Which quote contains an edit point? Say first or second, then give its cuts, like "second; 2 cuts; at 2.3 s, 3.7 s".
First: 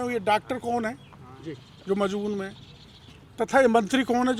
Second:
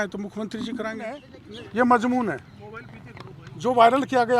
second; 1 cut; at 1.4 s